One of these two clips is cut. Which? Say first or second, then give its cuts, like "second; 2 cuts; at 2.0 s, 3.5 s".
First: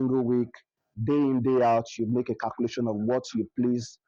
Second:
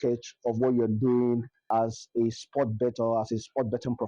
second; 1 cut; at 1.6 s